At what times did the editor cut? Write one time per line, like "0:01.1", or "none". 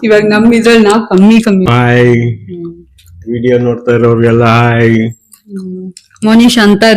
0:01.7